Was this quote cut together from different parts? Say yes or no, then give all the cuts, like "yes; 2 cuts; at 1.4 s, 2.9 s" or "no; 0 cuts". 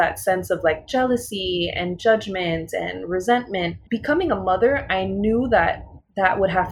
yes; 1 cut; at 3.8 s